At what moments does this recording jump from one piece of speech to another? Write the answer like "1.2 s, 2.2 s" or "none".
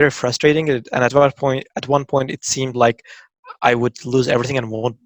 none